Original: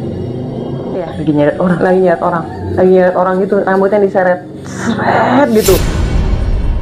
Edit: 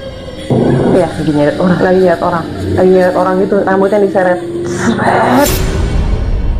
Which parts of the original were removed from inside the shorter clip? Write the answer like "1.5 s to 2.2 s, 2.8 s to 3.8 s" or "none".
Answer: 5.5 s to 5.7 s